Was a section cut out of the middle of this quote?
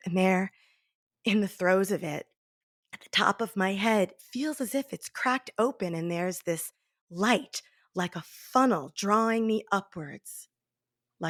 no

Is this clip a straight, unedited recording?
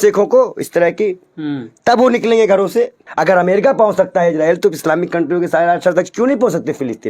no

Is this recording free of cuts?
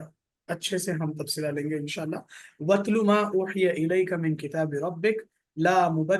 yes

